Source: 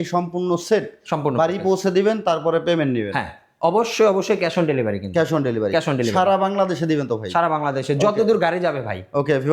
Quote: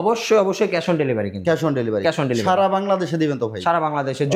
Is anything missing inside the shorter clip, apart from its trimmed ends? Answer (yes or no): no